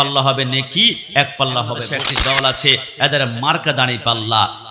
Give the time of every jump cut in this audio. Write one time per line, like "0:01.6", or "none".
0:01.9